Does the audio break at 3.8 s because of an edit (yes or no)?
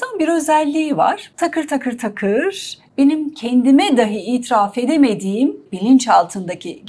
no